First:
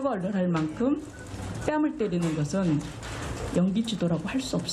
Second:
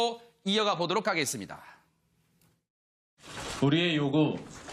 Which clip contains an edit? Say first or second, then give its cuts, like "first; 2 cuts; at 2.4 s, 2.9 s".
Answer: first; 1 cut; at 3.1 s